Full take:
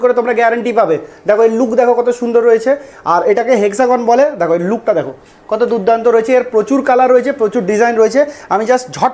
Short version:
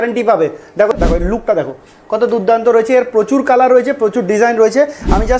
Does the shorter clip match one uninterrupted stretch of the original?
no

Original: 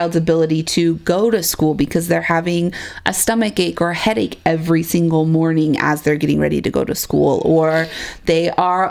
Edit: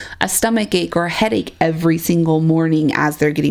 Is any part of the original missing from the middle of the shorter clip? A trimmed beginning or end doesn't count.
no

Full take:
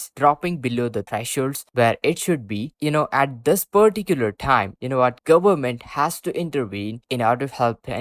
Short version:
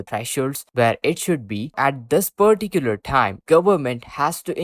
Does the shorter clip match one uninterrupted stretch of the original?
no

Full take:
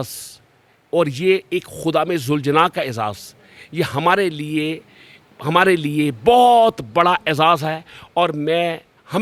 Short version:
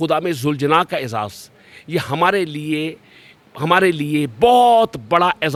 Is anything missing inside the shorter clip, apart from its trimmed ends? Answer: no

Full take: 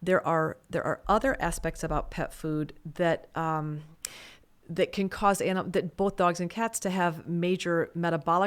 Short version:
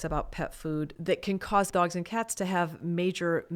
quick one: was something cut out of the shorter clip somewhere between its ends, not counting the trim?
yes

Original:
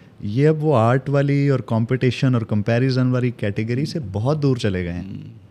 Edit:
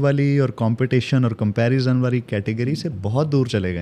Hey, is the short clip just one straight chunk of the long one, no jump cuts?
yes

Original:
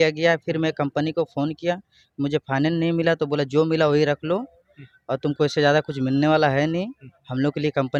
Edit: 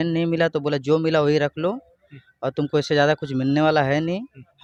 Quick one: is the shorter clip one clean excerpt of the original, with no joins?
yes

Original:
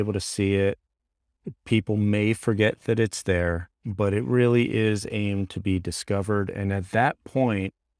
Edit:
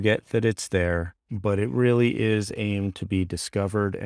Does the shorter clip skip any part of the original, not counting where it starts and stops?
no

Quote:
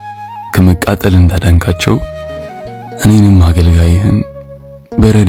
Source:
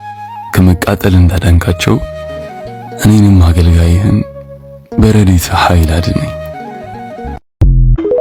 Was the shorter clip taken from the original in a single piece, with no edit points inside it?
yes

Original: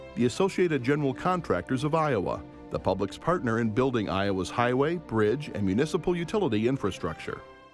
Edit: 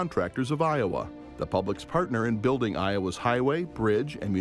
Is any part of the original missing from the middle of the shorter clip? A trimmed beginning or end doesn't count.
no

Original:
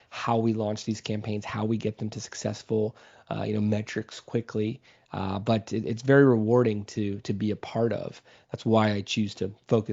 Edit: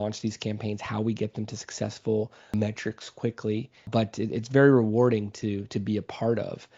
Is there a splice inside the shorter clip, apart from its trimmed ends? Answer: yes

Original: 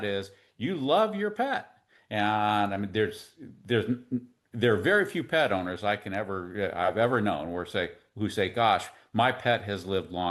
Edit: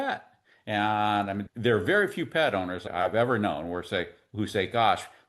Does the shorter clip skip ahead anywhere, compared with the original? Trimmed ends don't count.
yes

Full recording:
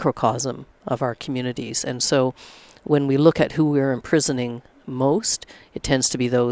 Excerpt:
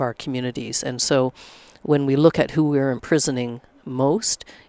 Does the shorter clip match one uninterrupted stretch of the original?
yes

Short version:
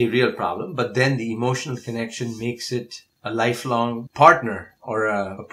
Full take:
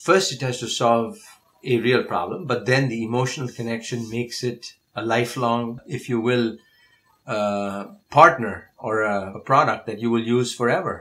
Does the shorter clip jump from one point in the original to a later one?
yes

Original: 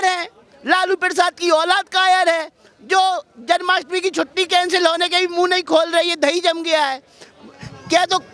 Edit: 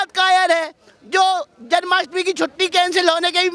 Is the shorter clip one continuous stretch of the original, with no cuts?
yes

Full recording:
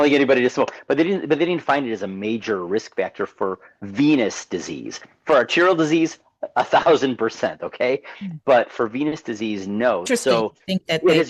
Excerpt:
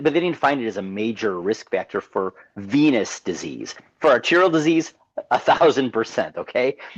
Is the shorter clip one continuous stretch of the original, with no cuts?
yes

